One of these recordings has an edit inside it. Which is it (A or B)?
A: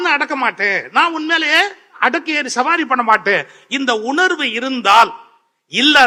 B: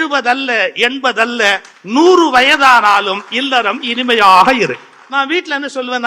B